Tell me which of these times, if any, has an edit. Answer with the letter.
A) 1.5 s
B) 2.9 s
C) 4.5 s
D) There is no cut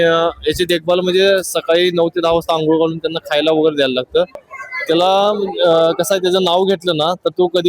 C